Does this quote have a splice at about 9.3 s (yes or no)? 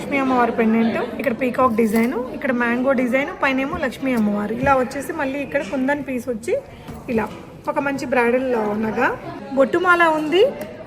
yes